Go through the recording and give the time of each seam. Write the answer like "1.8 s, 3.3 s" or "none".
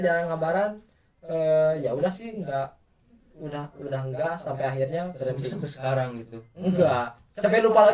none